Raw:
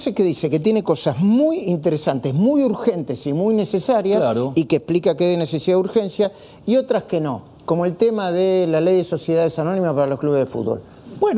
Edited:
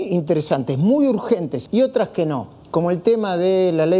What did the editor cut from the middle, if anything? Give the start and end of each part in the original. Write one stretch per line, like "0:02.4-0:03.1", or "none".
0:03.1-0:06.5